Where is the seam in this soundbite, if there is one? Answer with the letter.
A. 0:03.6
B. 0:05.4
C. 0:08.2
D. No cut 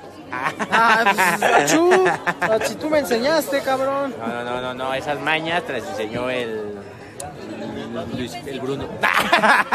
A